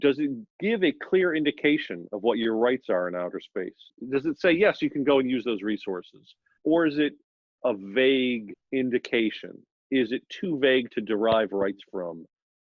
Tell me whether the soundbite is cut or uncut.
cut